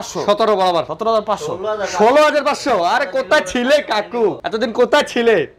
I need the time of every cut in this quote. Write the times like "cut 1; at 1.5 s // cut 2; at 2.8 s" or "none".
cut 1; at 0.9 s // cut 2; at 4.4 s